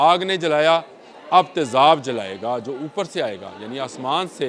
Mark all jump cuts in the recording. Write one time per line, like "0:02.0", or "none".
none